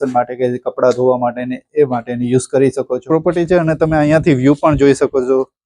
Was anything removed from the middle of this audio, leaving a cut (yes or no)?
yes